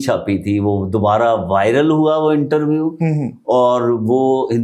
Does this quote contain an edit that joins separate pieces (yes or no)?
no